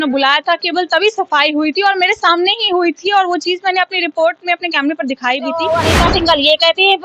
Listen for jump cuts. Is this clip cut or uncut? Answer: cut